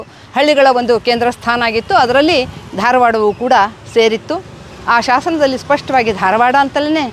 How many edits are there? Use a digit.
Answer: 0